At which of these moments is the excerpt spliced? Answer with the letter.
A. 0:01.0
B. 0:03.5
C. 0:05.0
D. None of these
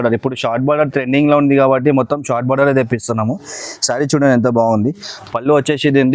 D